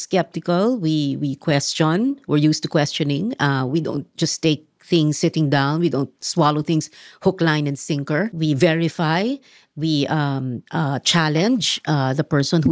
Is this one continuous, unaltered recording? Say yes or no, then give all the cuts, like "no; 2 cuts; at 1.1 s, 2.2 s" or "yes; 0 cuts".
no; 1 cut; at 8.3 s